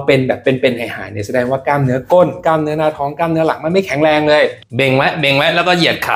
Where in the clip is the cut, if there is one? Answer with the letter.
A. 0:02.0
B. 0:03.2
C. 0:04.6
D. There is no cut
C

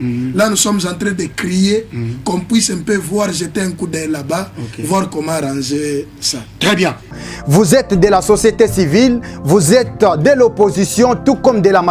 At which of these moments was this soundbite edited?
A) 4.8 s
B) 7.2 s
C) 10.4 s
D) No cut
B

